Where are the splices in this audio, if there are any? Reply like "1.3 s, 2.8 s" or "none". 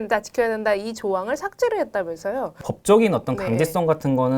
2.5 s